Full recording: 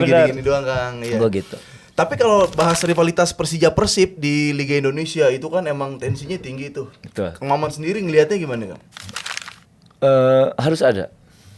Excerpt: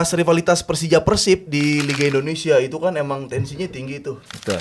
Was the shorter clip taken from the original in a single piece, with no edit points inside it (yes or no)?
yes